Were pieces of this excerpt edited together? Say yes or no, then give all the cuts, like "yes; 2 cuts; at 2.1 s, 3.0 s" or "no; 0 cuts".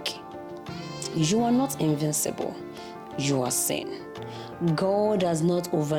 no; 0 cuts